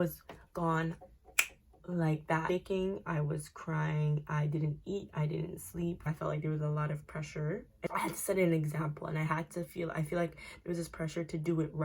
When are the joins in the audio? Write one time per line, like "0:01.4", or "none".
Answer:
0:02.5
0:06.0
0:07.9